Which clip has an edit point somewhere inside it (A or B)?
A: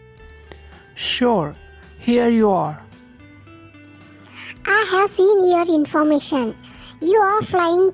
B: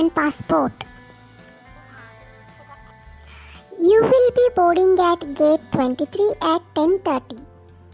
A